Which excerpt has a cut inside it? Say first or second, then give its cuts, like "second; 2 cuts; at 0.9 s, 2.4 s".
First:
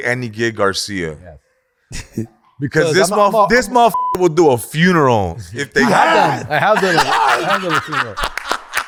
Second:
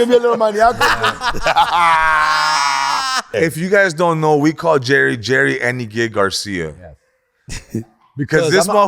second; 1 cut; at 3.3 s